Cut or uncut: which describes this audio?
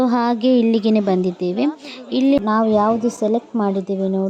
cut